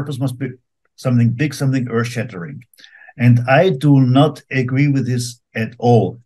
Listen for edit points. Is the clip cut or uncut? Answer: uncut